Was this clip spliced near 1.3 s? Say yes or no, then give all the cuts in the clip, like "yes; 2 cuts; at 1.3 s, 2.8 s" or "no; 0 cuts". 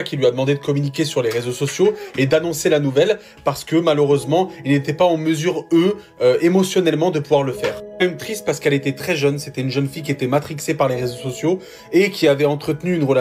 no; 0 cuts